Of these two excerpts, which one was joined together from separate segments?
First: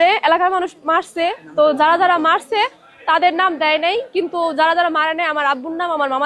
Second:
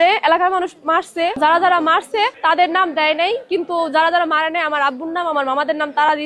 second; 2 cuts; at 1.4 s, 2.4 s

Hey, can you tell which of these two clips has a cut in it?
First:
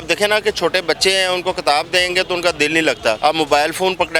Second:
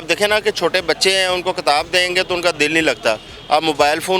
first; 1 cut; at 3.2 s

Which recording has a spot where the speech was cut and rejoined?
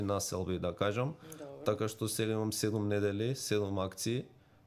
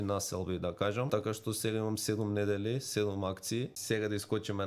second; 2 cuts; at 1.1 s, 3.8 s

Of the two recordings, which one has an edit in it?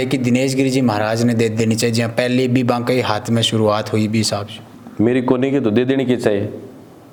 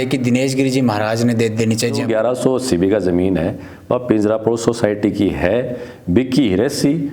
second; 1 cut; at 2.0 s

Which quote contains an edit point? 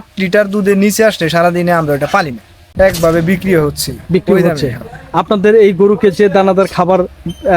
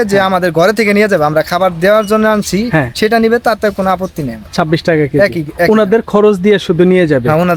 first; 1 cut; at 2.6 s

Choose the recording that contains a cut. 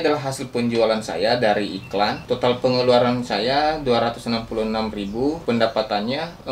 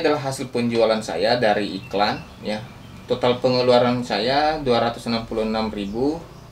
first; 2 cuts; at 2.2 s, 5.4 s

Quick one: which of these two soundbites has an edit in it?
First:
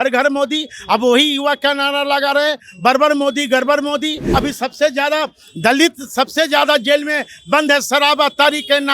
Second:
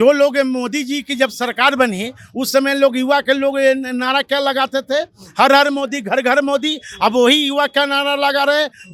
first; 1 cut; at 4.2 s

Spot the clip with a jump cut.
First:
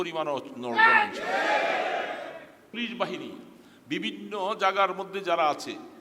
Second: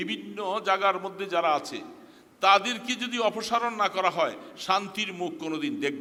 first; 1 cut; at 2.7 s

